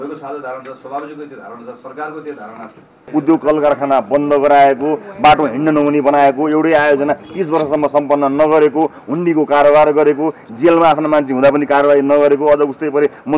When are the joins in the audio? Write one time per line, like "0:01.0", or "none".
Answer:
0:03.1